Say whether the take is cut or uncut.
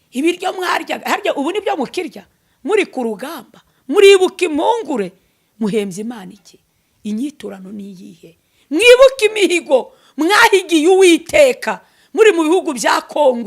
uncut